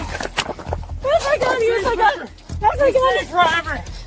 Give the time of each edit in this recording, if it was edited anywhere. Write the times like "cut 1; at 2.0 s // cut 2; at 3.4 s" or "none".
none